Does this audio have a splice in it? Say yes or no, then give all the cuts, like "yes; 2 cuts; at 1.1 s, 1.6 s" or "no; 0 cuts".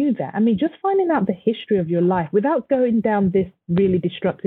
no; 0 cuts